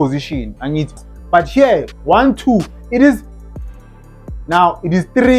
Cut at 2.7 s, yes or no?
no